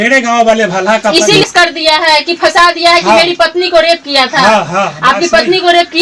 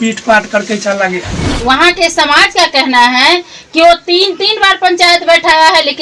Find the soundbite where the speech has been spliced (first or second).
second